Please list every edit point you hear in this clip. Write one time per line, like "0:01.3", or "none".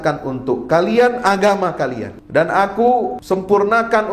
0:02.1
0:03.2